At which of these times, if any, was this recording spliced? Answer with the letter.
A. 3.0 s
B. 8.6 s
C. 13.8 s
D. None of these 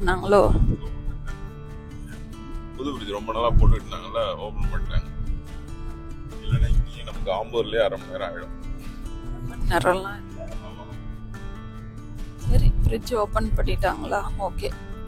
D